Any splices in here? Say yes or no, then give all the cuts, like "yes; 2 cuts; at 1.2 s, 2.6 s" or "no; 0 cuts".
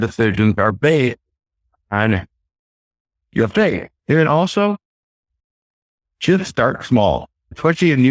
yes; 1 cut; at 5.4 s